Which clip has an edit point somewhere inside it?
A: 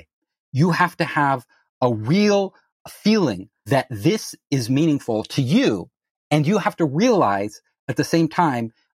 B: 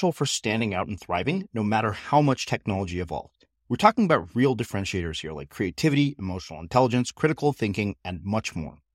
A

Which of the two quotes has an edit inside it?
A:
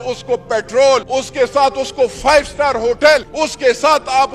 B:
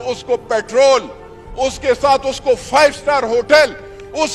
A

